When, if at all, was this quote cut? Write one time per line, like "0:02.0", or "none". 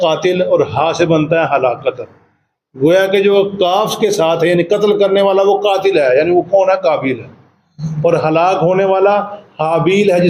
none